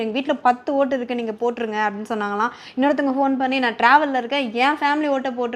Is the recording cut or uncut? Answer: uncut